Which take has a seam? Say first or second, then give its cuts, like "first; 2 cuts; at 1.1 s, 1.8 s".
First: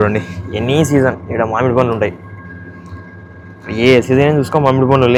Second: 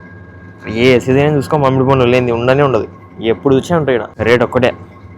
second; 1 cut; at 4.1 s